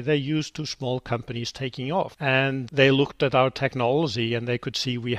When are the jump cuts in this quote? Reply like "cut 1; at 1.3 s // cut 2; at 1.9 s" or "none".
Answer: cut 1; at 2.4 s